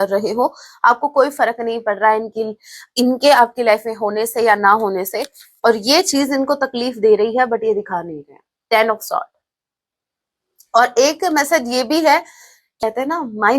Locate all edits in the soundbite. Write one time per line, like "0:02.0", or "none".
0:12.6

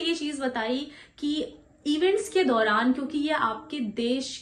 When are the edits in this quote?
none

